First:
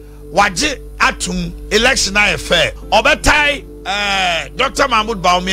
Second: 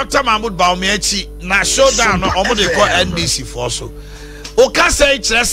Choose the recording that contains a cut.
first; 2 cuts; at 2.8 s, 3.7 s

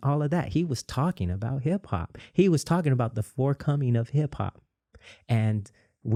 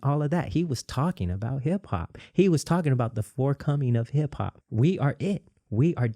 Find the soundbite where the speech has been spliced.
second; 1 cut; at 4.6 s

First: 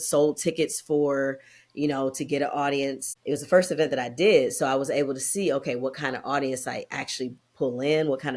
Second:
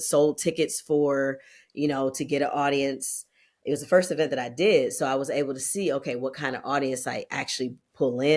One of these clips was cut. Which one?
first; 1 cut; at 3.1 s

